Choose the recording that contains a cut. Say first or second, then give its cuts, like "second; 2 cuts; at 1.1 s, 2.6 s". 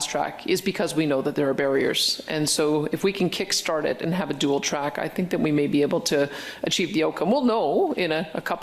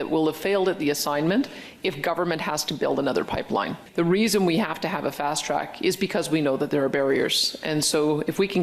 second; 1 cut; at 3.8 s